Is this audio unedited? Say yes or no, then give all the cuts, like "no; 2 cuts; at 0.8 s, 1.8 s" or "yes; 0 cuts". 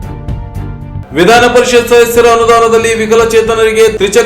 no; 1 cut; at 1.0 s